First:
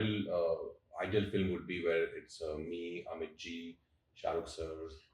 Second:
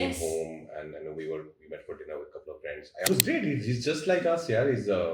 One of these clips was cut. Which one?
second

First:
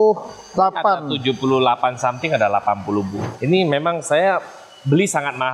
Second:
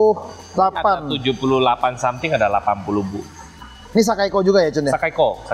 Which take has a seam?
first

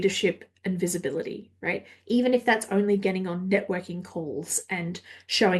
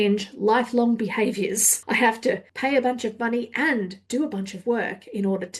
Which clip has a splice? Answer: second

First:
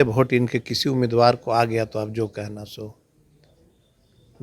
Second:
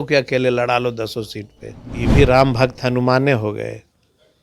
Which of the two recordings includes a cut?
second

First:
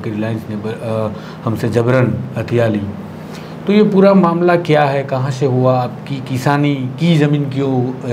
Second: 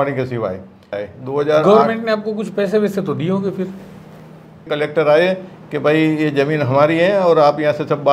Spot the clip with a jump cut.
second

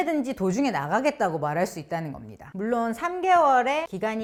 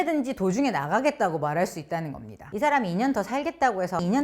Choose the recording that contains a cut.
second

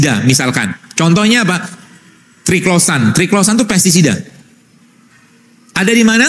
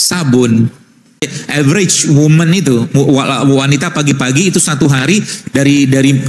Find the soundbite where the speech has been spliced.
second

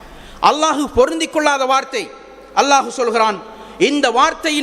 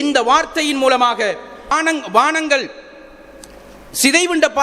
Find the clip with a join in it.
second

